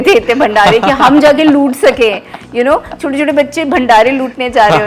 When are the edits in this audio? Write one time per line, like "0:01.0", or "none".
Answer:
none

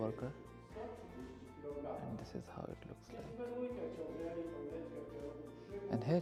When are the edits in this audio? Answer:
none

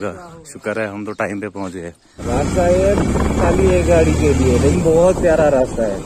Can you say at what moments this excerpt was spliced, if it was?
0:02.2

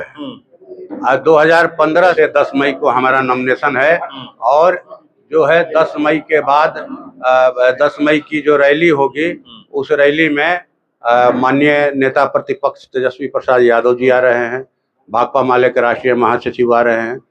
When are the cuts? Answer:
0:02.1

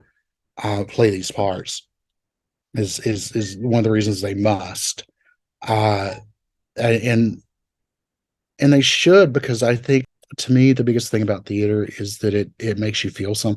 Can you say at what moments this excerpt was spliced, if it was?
0:10.0

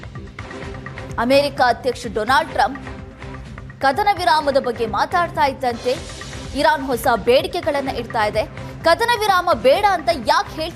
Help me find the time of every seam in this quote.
0:01.1

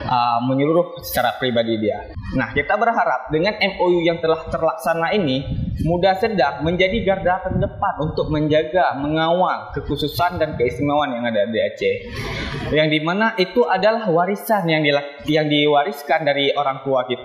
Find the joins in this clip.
0:02.2

